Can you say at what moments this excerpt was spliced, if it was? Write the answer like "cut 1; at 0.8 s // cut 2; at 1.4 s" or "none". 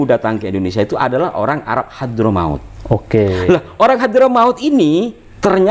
none